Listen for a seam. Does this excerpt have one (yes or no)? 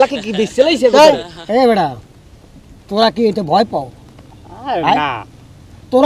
no